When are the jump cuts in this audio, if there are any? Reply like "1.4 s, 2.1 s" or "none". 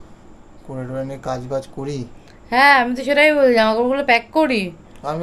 none